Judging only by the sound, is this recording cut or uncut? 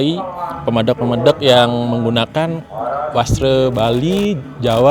uncut